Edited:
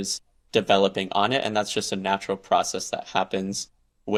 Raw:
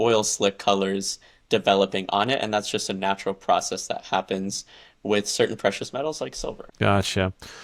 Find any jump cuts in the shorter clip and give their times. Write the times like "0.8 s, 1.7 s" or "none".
none